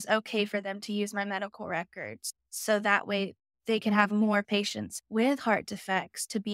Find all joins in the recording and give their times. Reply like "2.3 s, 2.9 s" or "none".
2.2 s